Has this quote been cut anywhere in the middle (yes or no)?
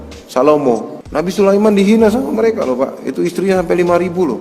yes